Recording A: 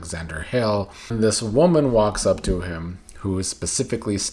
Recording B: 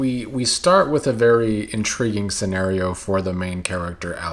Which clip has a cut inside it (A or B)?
A